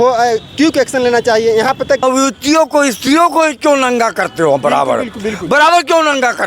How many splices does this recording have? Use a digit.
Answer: 1